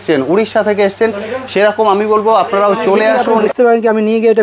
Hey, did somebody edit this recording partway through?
yes; 1 cut; at 3.5 s

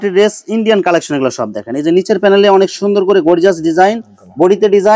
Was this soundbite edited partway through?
no; 0 cuts

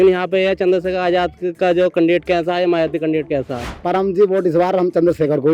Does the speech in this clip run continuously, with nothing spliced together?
no; 1 cut; at 3.8 s

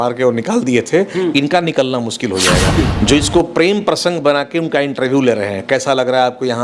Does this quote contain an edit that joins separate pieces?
yes; 1 cut; at 2.8 s

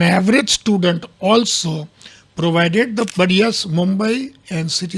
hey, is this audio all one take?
no; 1 cut; at 3.1 s

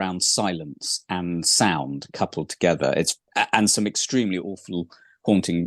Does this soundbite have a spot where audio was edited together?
yes; 1 cut; at 3.3 s

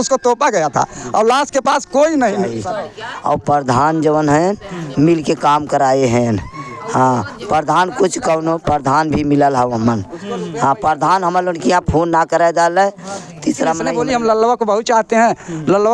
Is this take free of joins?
no; 2 cuts; at 2.6 s, 13.9 s

